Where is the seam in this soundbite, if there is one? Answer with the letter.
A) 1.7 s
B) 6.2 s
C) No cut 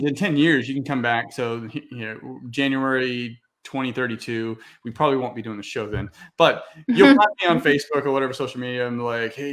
C